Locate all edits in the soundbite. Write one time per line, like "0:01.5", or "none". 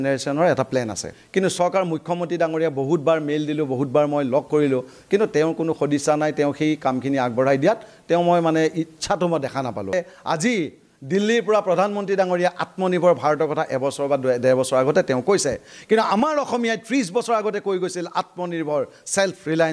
0:01.1
0:09.9

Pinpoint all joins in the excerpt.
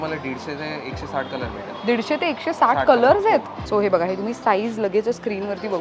0:03.6

